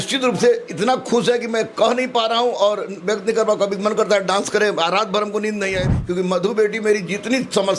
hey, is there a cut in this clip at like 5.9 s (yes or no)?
yes